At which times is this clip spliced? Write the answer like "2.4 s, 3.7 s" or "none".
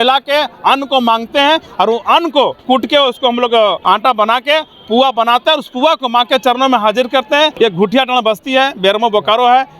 2.6 s, 3.8 s, 7.5 s